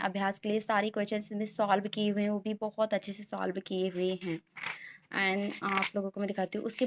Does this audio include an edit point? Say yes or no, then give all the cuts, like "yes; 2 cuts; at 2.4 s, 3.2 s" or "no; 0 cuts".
no; 0 cuts